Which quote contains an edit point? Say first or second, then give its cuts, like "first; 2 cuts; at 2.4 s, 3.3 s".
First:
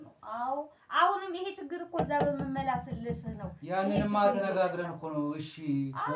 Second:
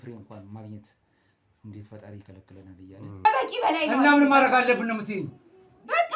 second; 1 cut; at 3.3 s